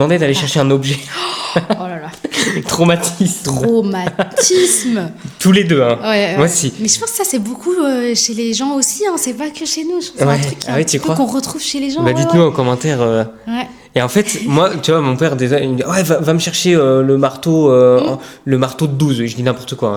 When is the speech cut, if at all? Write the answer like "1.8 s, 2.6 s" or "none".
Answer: none